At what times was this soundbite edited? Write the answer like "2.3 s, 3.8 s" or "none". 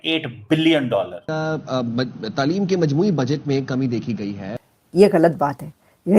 1.2 s, 4.5 s